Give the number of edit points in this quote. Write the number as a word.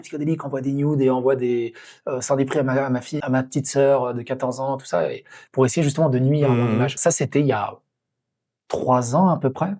two